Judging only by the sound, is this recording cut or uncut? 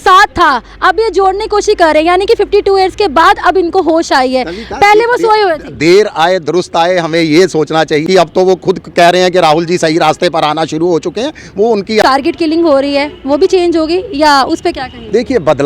cut